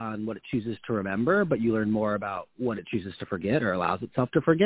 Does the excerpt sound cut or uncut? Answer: uncut